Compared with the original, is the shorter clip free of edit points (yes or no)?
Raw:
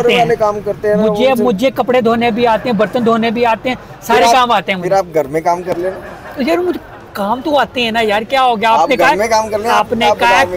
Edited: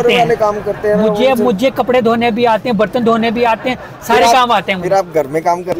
yes